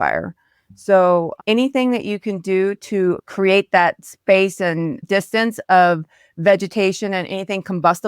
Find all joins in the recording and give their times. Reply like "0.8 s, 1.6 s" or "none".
3.2 s